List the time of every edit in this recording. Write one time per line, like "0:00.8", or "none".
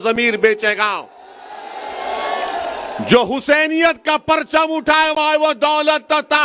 none